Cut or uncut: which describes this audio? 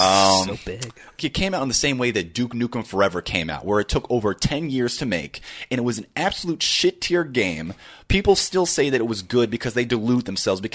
cut